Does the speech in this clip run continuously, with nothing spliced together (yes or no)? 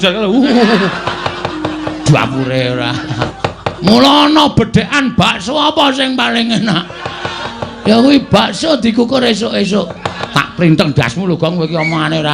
no